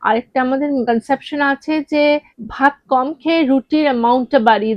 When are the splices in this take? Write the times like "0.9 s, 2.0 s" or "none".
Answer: 0.8 s, 2.4 s